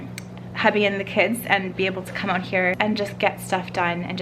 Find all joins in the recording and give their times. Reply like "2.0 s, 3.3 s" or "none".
2.8 s